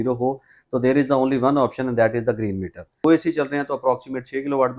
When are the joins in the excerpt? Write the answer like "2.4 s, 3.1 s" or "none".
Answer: 3.0 s